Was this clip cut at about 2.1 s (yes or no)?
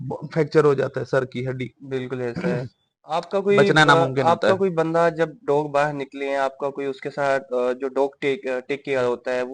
no